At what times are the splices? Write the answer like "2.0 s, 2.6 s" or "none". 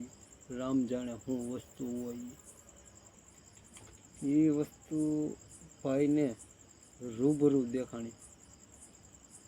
3.2 s